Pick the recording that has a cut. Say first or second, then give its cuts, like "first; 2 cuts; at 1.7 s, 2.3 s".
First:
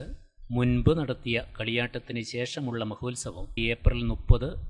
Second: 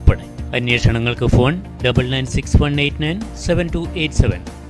first; 1 cut; at 3.6 s